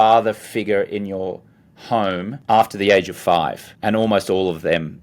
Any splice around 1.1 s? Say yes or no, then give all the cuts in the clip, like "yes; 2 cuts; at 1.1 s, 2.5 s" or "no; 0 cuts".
no; 2 cuts; at 2.3 s, 3.7 s